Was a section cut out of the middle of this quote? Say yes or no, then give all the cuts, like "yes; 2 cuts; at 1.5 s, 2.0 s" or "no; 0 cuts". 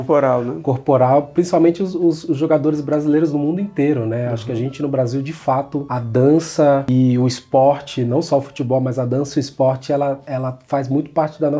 no; 0 cuts